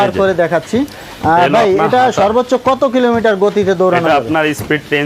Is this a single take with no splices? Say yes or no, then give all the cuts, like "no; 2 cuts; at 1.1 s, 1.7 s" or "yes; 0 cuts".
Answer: yes; 0 cuts